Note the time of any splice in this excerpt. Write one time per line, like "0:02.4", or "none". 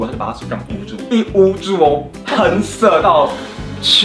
0:01.0